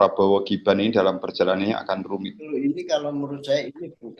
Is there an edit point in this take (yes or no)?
yes